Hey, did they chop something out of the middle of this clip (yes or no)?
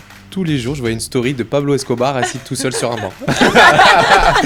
no